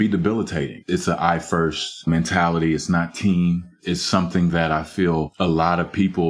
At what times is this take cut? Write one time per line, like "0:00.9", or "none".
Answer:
none